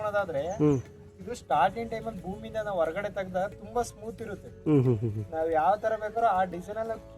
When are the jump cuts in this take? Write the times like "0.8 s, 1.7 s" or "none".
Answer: none